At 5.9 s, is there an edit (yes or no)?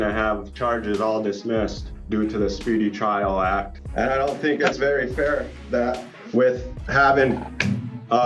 no